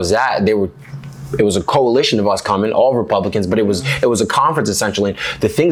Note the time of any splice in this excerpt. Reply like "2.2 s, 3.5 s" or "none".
none